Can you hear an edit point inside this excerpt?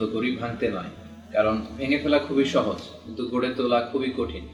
no; 0 cuts

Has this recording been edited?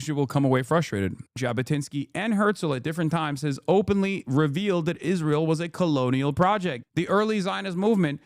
yes; 2 cuts; at 1.2 s, 6.8 s

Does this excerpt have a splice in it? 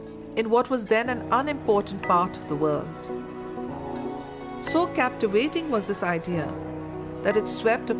yes; 1 cut; at 1.0 s

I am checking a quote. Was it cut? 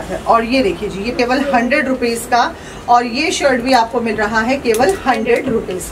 yes; 1 cut; at 1.1 s

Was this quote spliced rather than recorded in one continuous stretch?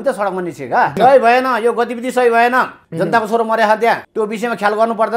yes; 3 cuts; at 1.0 s, 2.8 s, 4.1 s

